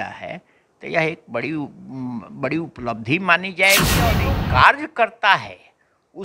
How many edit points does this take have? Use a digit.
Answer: 1